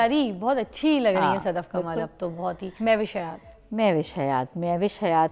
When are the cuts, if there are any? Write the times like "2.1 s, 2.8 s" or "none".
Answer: 2.7 s